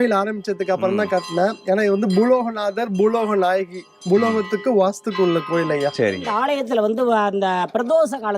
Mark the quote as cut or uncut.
cut